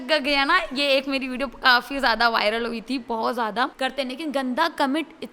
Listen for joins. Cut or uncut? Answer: cut